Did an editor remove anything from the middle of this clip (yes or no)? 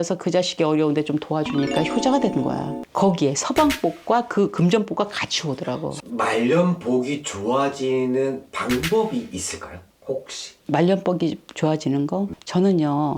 yes